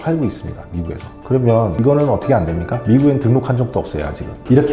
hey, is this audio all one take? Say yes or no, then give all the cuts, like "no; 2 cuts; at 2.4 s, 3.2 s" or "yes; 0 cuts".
yes; 0 cuts